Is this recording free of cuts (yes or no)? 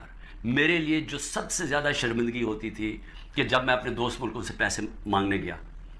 yes